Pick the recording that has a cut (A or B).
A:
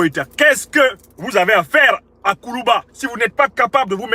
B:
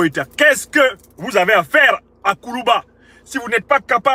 A